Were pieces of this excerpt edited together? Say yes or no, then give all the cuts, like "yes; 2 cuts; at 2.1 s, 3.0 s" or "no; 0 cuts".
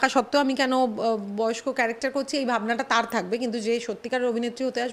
no; 0 cuts